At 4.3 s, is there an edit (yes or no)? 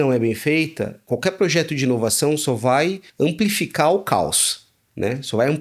no